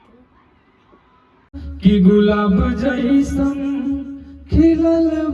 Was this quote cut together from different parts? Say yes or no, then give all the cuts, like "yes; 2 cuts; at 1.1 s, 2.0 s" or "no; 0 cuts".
yes; 1 cut; at 1.6 s